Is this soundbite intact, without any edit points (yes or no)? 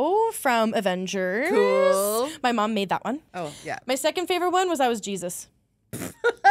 no